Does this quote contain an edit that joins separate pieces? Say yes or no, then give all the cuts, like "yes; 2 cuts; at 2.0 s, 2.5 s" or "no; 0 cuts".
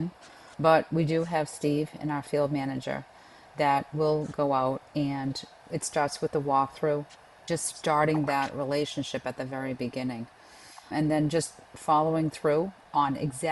yes; 2 cuts; at 5.5 s, 7.5 s